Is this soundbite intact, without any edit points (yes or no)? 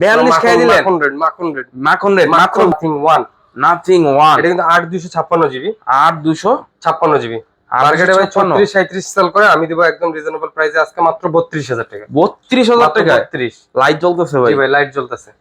no